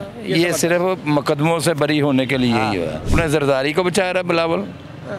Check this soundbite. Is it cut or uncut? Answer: cut